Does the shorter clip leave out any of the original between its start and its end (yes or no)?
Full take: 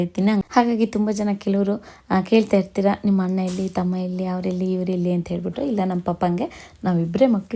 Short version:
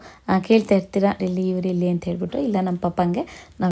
yes